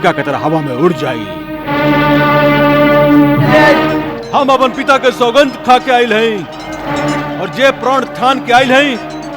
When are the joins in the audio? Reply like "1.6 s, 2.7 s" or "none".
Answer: 3.9 s